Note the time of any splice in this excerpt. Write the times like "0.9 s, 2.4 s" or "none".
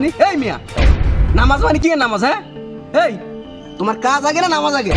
3.6 s